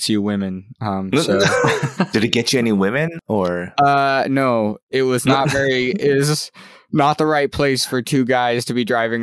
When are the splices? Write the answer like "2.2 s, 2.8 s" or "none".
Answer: 2.1 s, 3.1 s